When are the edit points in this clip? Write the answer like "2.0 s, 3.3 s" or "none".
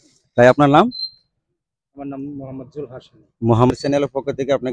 3.7 s